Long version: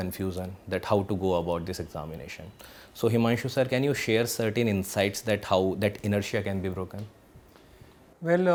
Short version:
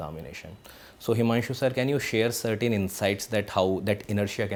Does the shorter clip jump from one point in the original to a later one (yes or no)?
no